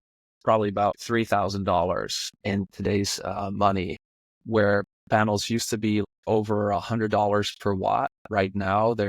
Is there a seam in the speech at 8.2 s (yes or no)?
no